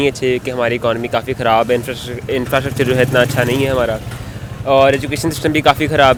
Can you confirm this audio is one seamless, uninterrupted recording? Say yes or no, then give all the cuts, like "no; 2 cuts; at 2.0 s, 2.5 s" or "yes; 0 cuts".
yes; 0 cuts